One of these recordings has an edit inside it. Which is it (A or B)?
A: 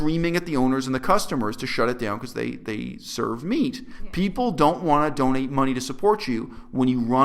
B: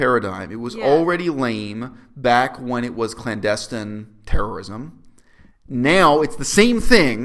A